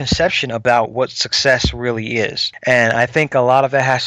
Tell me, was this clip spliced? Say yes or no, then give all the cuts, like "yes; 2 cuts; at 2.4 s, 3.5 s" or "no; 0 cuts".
yes; 1 cut; at 2.5 s